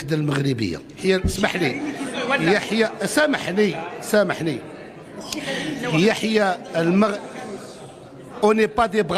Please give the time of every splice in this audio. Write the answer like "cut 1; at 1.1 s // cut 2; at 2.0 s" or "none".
cut 1; at 1.0 s